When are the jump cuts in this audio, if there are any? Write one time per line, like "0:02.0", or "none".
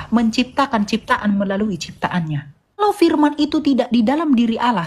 0:02.8